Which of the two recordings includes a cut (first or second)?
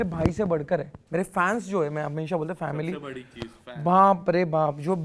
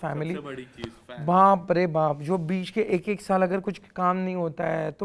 first